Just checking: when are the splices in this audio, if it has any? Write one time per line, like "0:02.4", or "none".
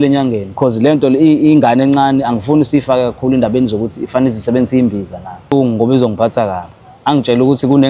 0:05.5

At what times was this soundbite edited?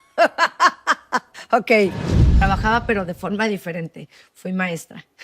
0:02.3

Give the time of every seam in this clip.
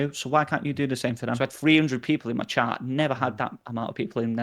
0:01.3

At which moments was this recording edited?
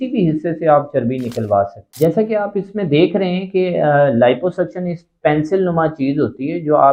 0:01.8

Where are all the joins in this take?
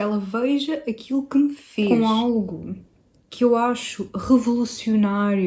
0:01.9

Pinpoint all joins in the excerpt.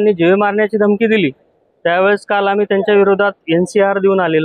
none

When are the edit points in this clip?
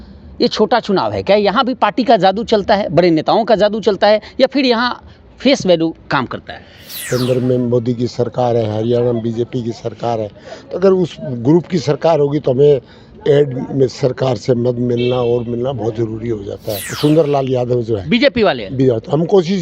0:07.1
0:16.9

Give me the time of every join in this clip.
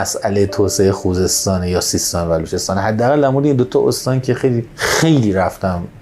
0:04.7

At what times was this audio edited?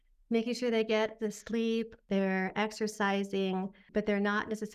0:02.0
0:03.8

